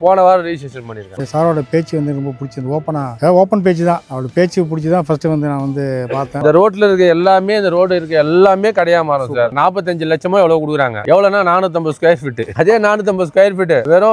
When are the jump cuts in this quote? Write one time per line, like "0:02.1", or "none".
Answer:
0:01.2
0:06.3
0:09.5
0:11.0